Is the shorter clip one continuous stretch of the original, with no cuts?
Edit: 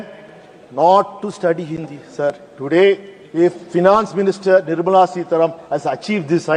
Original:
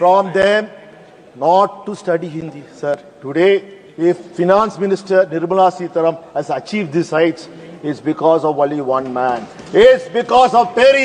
yes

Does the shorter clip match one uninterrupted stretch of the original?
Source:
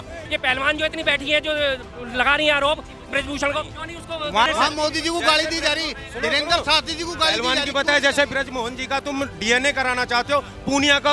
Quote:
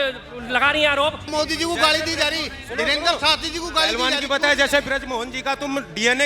no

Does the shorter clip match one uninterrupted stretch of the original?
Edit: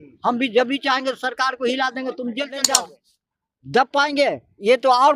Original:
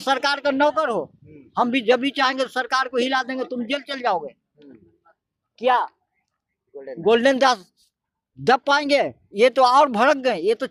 no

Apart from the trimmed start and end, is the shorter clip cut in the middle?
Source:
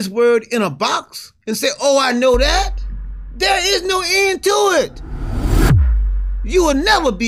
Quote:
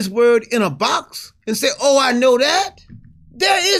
no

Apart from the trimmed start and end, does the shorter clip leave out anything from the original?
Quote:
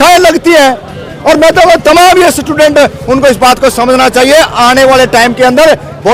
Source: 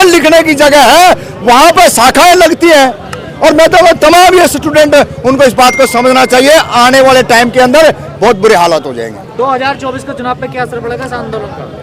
no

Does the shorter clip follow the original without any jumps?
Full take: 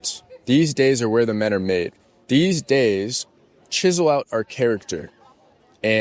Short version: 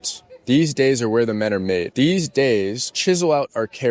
no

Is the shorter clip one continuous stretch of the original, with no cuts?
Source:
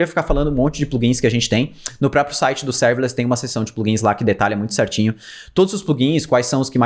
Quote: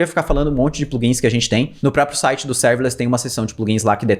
no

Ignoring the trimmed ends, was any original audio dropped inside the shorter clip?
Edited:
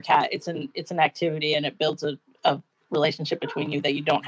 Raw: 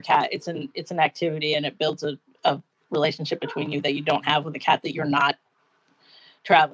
no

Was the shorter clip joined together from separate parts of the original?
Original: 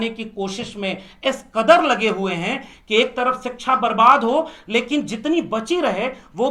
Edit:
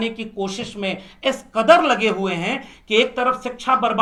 no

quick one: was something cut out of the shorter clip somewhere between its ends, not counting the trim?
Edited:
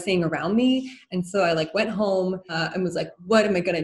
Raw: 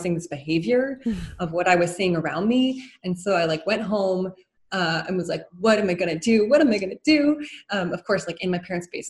yes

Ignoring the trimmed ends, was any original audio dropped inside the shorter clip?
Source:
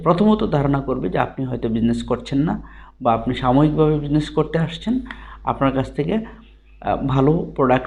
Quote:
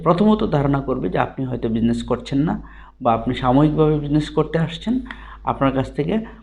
no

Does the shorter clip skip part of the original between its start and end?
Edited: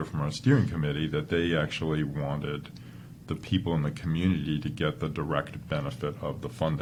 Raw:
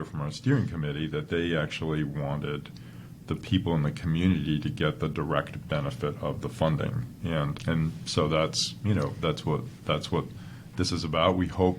no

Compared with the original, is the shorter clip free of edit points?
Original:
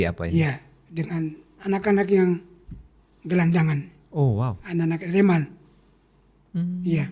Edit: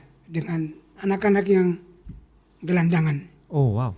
yes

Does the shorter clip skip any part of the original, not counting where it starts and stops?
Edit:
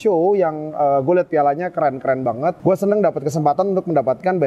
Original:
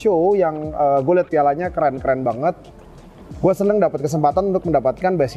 yes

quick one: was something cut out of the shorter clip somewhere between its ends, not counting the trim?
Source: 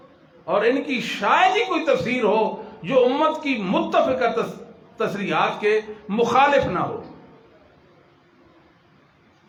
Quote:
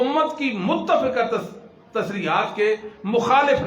no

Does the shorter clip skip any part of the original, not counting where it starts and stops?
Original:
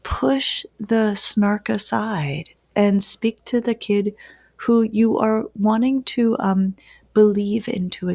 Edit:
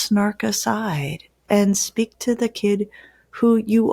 no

